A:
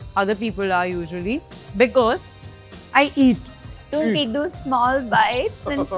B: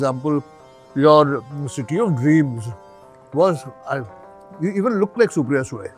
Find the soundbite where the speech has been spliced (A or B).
A